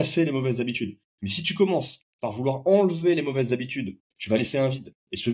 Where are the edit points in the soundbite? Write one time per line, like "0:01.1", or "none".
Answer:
0:04.1